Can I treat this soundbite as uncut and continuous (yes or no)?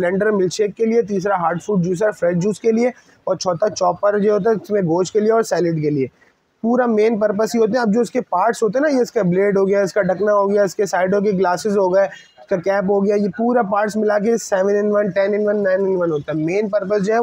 yes